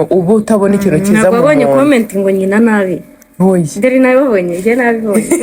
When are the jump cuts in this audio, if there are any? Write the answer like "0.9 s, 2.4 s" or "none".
none